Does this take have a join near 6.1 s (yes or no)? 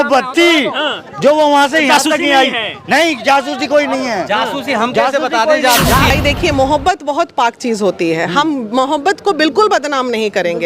yes